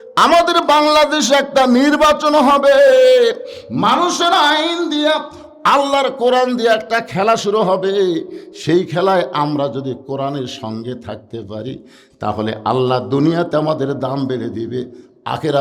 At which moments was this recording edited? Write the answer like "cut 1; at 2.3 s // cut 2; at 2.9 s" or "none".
none